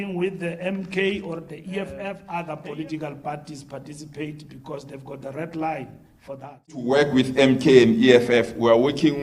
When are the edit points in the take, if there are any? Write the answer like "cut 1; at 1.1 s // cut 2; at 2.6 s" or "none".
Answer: cut 1; at 2.2 s // cut 2; at 6.9 s